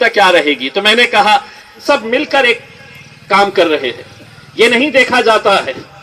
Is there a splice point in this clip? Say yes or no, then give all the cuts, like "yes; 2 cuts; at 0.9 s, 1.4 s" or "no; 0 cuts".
yes; 1 cut; at 1.8 s